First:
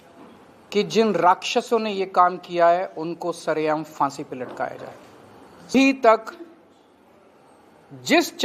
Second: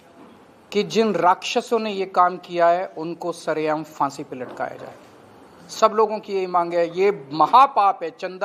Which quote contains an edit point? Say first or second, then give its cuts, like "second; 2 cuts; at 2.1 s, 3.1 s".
first; 1 cut; at 5.7 s